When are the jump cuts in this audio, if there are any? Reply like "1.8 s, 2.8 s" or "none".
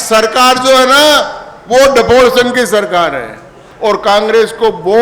3.6 s